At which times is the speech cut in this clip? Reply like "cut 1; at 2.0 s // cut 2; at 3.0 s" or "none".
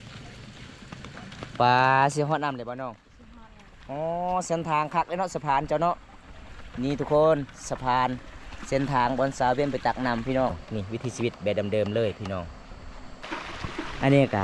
cut 1; at 10.6 s // cut 2; at 13.2 s